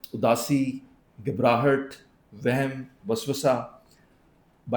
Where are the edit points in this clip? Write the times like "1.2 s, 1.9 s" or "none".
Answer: none